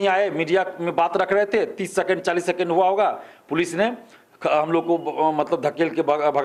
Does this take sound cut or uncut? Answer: uncut